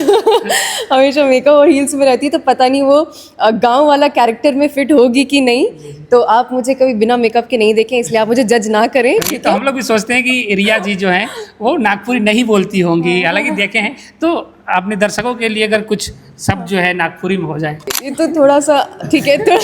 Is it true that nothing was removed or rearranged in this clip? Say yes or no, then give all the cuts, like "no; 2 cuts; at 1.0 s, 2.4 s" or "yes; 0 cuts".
no; 2 cuts; at 9.4 s, 18.0 s